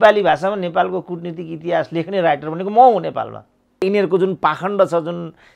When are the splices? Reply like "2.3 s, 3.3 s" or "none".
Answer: 3.8 s